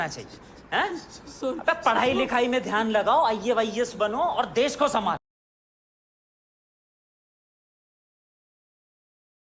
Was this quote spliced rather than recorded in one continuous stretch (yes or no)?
no